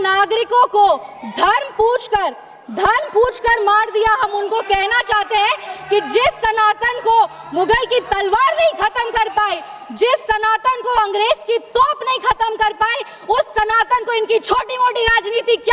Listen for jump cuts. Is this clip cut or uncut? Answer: uncut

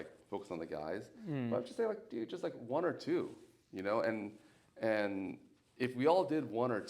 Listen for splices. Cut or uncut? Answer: uncut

